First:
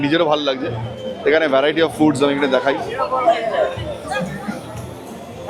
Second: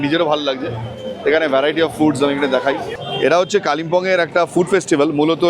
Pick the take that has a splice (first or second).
second